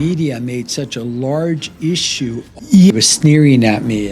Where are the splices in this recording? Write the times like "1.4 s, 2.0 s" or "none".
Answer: 2.9 s